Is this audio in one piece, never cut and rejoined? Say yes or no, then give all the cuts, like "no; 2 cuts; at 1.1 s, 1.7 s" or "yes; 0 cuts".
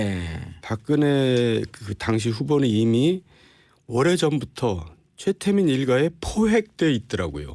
yes; 0 cuts